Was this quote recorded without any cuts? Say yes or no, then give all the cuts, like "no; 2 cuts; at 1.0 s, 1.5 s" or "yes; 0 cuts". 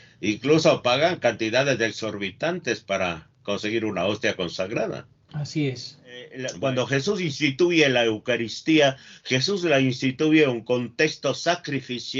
no; 1 cut; at 6.4 s